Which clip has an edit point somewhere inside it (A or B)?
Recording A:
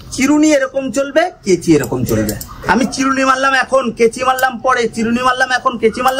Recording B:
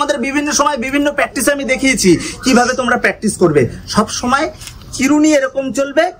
A